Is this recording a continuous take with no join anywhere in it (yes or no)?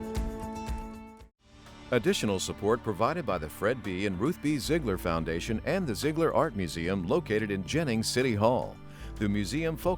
no